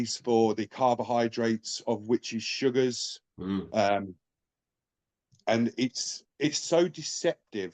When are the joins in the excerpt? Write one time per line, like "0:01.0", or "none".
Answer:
none